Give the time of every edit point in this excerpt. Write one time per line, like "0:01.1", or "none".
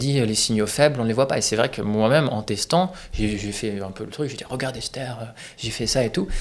none